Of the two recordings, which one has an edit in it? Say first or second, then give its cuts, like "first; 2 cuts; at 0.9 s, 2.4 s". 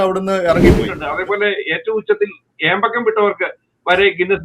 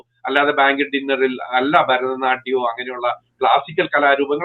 first; 1 cut; at 1.0 s